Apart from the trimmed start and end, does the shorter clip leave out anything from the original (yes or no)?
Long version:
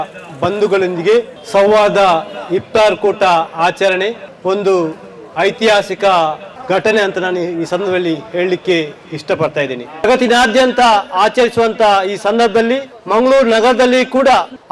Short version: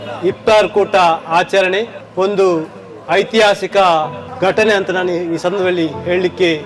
no